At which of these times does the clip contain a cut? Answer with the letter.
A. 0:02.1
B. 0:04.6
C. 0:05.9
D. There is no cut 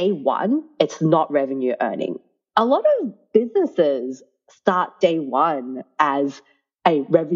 A